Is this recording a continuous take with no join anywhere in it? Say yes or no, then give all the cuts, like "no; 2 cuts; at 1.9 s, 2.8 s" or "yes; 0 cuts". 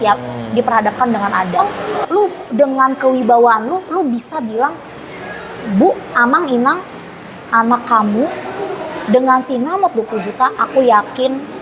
no; 1 cut; at 1.6 s